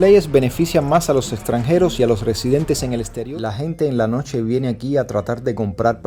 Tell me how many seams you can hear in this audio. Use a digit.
1